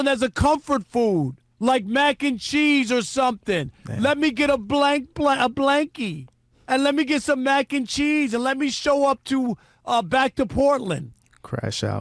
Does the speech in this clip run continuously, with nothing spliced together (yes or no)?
no